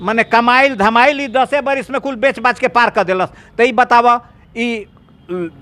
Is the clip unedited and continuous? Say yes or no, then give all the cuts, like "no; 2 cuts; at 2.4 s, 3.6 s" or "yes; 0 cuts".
yes; 0 cuts